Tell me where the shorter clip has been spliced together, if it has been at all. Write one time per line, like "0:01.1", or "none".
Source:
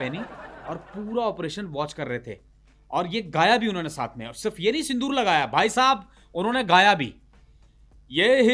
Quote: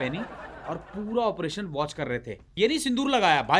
0:02.5